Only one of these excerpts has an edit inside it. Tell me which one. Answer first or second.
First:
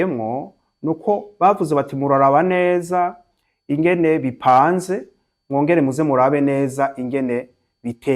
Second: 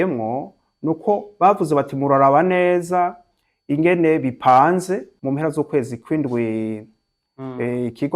second